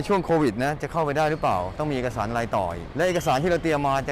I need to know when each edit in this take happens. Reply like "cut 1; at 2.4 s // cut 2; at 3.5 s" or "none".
cut 1; at 1.7 s